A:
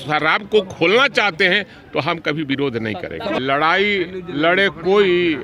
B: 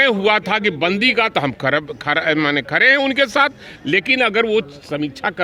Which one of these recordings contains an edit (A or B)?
A